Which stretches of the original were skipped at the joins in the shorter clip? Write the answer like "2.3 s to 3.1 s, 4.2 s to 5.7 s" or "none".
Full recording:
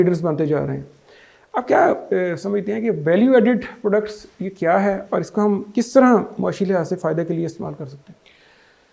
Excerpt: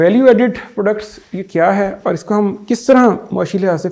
none

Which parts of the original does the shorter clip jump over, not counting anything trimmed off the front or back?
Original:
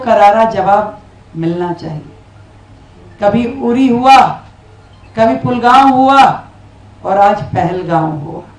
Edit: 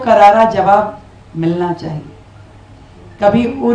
none

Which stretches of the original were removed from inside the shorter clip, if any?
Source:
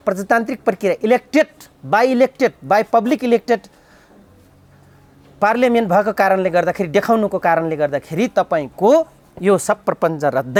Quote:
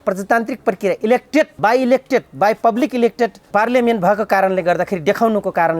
1.5 s to 1.8 s, 3.7 s to 5.3 s

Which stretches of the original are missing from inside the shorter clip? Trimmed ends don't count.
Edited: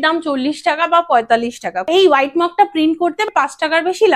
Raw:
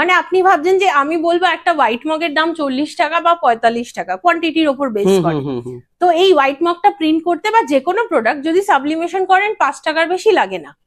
4.2 s to 6.1 s, 7.5 s to 9.5 s

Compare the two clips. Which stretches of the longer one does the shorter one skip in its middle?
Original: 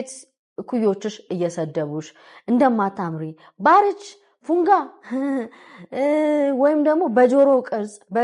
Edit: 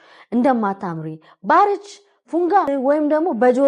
4.8 s to 6.4 s

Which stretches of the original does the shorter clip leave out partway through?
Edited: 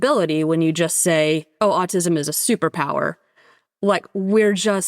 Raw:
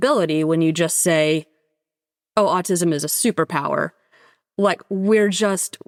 1.5 s to 2.2 s

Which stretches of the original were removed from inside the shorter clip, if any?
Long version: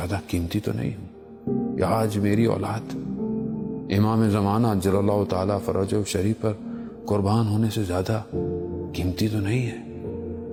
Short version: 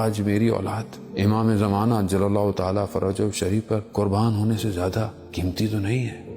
2.9 s to 3.7 s, 6.6 s to 7.0 s, 8.3 s to 8.8 s

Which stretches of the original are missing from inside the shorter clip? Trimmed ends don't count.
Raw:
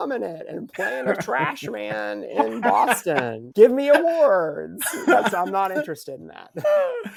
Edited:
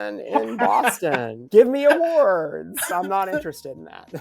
4.9 s to 5.3 s

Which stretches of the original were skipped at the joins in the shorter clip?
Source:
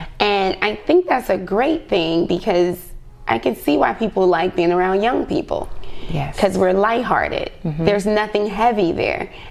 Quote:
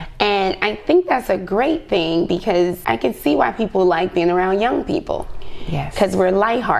2.8 s to 3.2 s

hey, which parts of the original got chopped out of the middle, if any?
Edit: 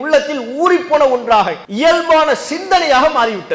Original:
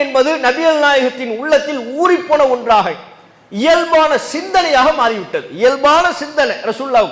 3.0 s to 3.5 s

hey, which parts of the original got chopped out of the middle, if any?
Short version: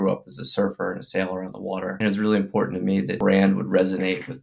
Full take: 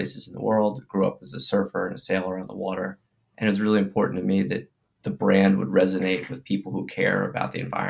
2.9 s to 3.4 s, 4.6 s to 5.2 s

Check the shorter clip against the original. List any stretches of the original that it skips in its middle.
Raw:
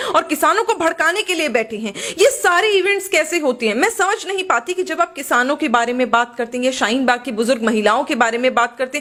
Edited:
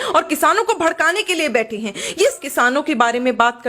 2.4 s to 5.1 s

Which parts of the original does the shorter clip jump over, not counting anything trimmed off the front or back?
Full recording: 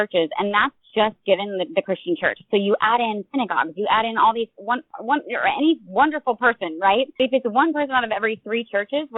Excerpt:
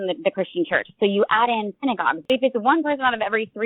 3.7 s to 7.1 s

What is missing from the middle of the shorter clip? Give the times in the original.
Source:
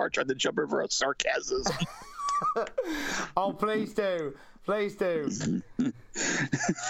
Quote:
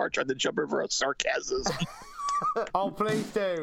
2.7 s to 3.3 s

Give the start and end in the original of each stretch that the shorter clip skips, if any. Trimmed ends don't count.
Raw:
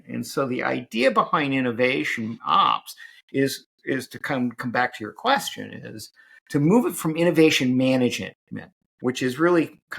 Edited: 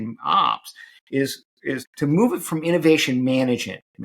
4.1 s to 6.4 s

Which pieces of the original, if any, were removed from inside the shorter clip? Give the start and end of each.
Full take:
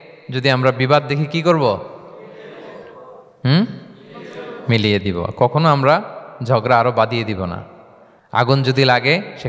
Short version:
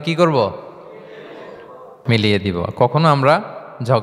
3.1 s to 4.5 s

